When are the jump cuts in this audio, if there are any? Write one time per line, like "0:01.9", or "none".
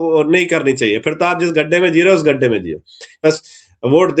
0:03.2